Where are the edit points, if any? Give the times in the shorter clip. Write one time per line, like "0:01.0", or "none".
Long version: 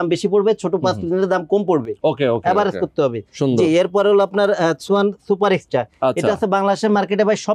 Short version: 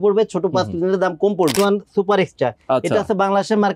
0:01.5